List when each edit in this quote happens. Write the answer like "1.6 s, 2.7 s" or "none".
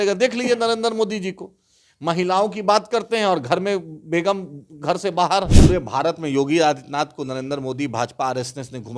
5.5 s